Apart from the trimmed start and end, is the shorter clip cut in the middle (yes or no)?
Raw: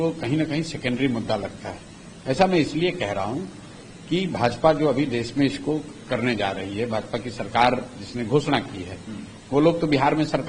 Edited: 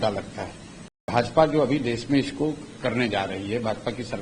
yes